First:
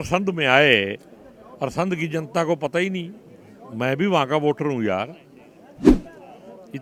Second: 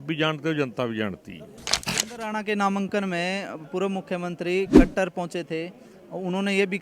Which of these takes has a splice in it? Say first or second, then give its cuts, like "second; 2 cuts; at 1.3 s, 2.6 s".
second; 1 cut; at 1.9 s